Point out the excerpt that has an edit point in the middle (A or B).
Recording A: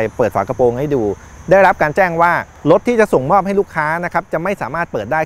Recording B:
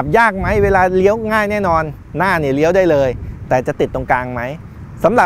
A